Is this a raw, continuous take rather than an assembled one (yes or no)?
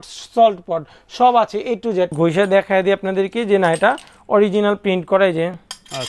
no